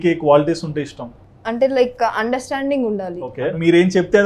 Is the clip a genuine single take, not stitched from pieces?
no; 1 cut; at 3.2 s

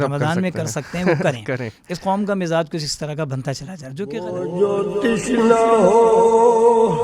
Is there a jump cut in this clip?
yes; 1 cut; at 4.1 s

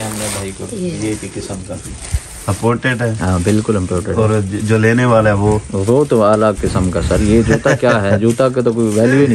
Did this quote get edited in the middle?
no; 0 cuts

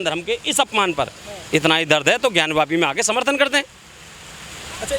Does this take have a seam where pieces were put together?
no; 0 cuts

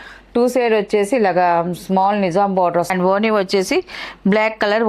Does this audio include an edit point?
yes; 1 cut; at 2.9 s

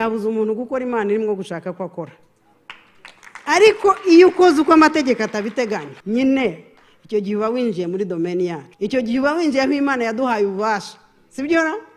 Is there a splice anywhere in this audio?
yes; 2 cuts; at 5.9 s, 8.7 s

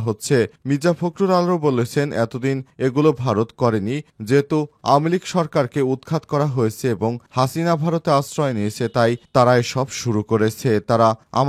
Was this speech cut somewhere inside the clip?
no; 0 cuts

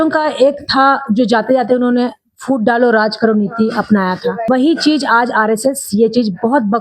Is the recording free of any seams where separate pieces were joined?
no; 1 cut; at 4.4 s

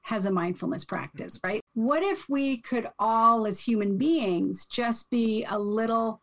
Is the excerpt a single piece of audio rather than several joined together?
no; 1 cut; at 1.6 s

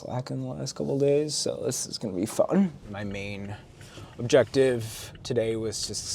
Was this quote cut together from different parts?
yes; 1 cut; at 2.8 s

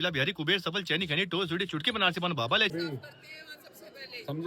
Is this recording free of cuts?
no; 1 cut; at 2.7 s

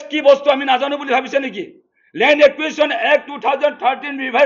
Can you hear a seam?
no; 0 cuts

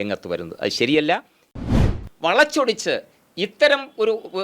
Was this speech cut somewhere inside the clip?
yes; 1 cut; at 1.7 s

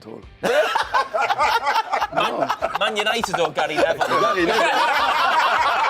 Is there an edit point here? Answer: no; 0 cuts

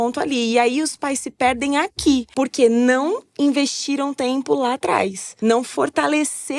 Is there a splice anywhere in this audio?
yes; 2 cuts; at 2.3 s, 5.2 s

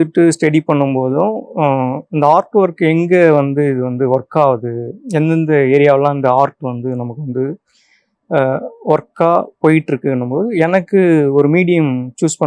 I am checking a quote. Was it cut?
no; 0 cuts

